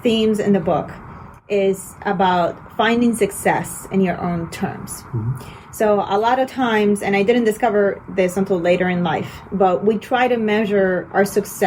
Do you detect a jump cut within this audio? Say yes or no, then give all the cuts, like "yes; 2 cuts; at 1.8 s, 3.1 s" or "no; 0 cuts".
no; 0 cuts